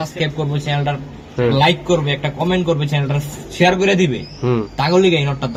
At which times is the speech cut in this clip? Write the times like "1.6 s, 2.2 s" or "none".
none